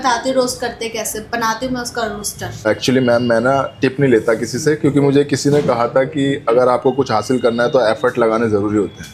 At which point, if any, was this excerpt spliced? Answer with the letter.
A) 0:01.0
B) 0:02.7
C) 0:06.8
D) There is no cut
B